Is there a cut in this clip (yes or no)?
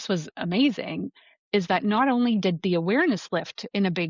no